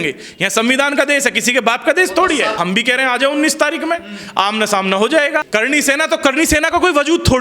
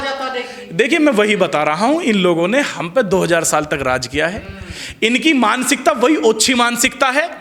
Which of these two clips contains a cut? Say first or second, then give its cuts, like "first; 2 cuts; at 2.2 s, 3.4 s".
first; 2 cuts; at 2.6 s, 5.5 s